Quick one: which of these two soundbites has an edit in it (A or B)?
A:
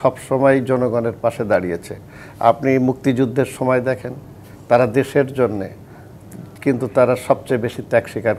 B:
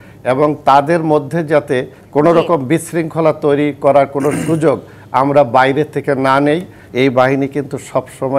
B